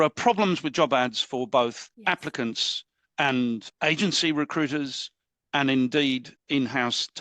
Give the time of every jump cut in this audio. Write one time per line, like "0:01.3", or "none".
0:01.9
0:03.7
0:06.3